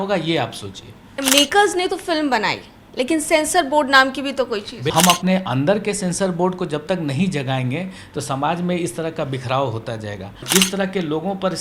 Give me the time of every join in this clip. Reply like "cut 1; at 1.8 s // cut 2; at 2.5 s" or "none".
cut 1; at 1.2 s // cut 2; at 4.9 s // cut 3; at 10.4 s